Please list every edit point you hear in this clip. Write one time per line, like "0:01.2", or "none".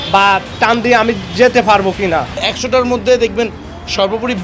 0:02.4